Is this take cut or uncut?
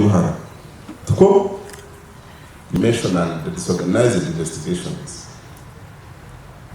cut